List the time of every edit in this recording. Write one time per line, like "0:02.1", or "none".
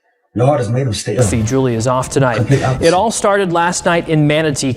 0:01.3